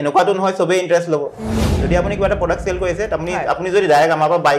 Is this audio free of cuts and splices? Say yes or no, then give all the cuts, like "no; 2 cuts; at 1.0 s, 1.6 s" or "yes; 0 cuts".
no; 1 cut; at 1.7 s